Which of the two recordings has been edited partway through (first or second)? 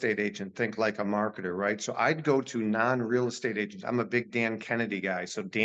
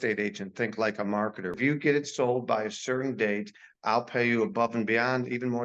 second